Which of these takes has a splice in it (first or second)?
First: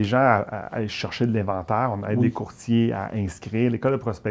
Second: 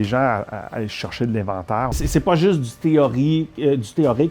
second